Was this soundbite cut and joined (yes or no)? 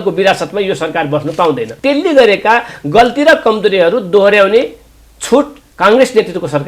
yes